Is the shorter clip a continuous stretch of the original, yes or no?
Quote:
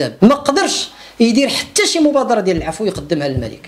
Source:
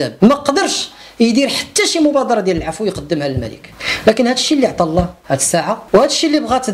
yes